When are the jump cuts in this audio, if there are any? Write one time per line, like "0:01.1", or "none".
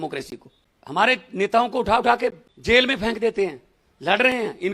0:02.5